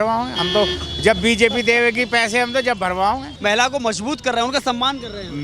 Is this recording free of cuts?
no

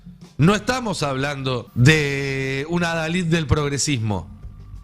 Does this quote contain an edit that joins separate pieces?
yes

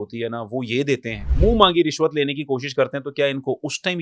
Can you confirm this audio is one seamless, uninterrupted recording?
no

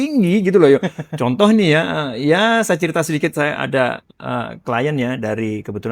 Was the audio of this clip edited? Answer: no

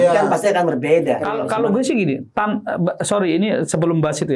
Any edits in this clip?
yes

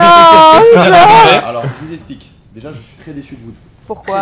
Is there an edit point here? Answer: no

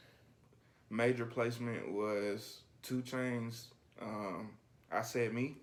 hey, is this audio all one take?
yes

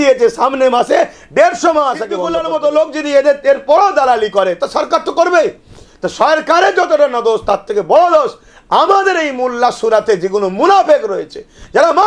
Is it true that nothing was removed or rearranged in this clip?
no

